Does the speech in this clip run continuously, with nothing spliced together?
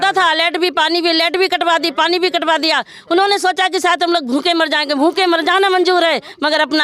yes; 0 cuts

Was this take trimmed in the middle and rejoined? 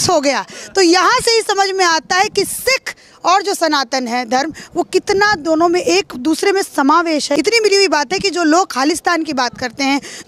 yes; 1 cut; at 7.3 s

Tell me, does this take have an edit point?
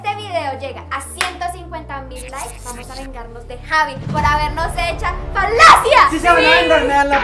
no; 0 cuts

